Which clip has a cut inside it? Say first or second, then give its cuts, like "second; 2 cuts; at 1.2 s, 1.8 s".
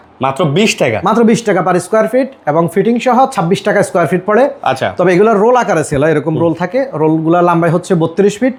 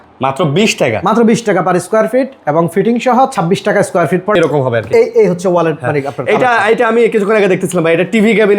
second; 1 cut; at 4.4 s